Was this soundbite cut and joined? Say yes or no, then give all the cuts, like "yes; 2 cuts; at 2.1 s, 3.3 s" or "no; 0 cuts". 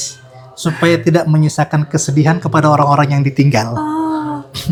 no; 0 cuts